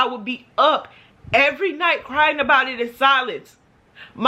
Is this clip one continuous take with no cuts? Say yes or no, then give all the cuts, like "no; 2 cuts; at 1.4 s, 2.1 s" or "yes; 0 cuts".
yes; 0 cuts